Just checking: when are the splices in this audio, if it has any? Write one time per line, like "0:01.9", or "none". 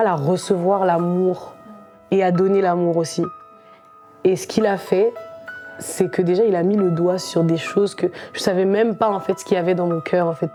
none